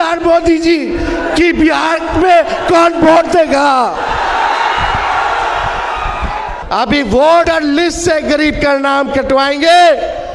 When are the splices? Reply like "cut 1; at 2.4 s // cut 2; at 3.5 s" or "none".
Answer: cut 1; at 6.5 s // cut 2; at 7.5 s